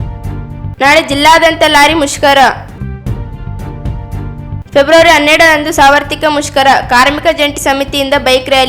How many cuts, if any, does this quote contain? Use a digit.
2